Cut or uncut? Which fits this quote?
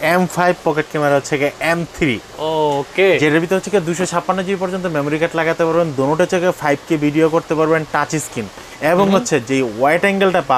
uncut